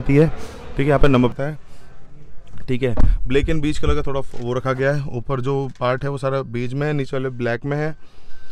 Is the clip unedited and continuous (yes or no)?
no